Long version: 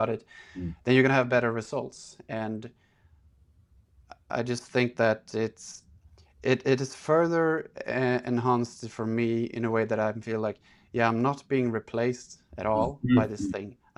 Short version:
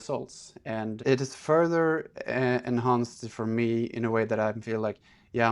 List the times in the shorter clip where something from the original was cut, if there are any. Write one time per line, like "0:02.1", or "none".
0:01.0